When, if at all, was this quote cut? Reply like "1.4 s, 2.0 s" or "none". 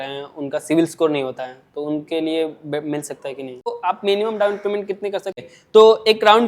3.7 s, 5.4 s